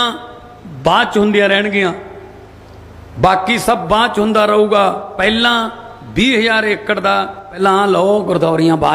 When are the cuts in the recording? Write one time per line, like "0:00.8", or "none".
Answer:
0:05.1
0:07.6